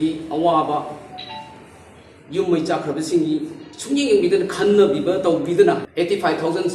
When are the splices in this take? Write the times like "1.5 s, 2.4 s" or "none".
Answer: 5.9 s